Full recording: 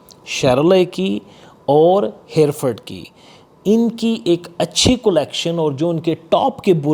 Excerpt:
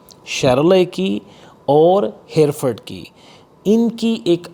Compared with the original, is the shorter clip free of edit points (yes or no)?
yes